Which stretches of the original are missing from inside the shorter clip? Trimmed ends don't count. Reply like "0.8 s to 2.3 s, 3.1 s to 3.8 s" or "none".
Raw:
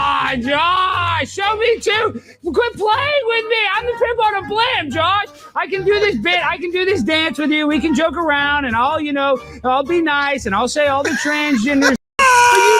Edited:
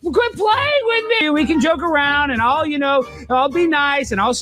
3.6 s to 7.6 s